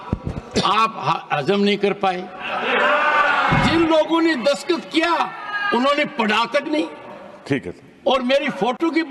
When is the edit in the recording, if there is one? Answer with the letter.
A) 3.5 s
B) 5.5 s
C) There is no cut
A